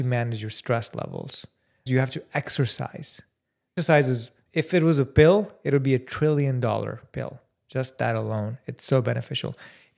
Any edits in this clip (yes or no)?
yes